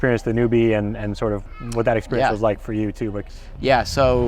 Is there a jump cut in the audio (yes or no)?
yes